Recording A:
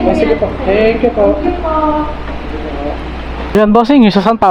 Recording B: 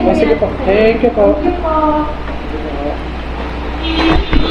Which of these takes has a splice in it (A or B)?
A